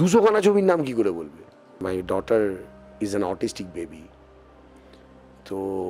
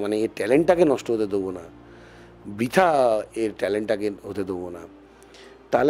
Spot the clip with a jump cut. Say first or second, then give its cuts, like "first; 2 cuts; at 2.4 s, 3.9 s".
first; 1 cut; at 1.8 s